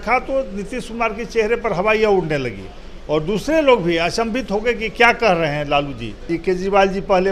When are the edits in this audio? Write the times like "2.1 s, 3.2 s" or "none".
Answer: 6.3 s